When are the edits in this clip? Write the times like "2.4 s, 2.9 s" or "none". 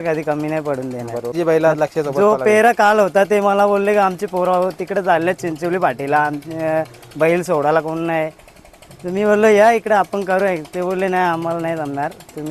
1.3 s